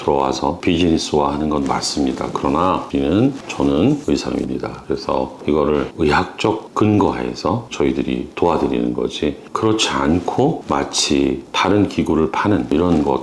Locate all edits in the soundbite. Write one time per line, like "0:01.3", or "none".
none

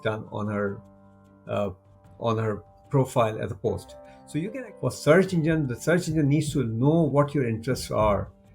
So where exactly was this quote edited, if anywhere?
0:04.5

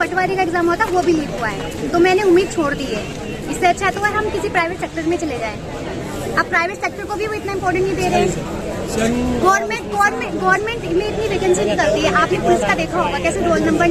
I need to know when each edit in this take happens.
none

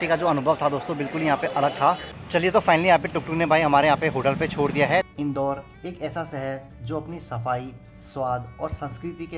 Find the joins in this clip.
0:02.1
0:05.1

